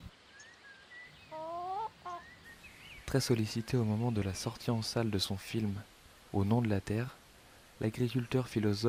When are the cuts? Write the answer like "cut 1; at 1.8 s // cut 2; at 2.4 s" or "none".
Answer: none